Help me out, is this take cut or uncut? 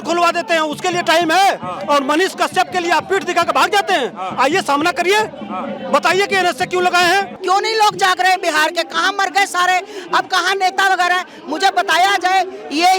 cut